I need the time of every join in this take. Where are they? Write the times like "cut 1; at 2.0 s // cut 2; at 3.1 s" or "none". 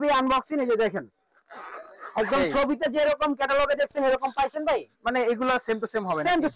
none